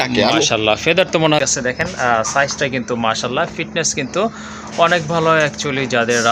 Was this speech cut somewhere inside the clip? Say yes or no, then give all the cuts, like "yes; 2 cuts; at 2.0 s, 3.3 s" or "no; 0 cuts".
yes; 1 cut; at 1.4 s